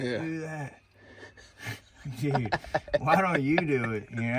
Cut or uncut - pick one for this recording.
uncut